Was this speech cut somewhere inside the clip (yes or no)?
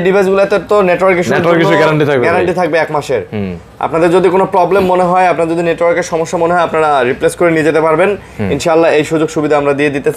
no